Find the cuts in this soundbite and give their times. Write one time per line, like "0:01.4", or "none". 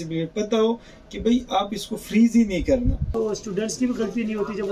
0:03.0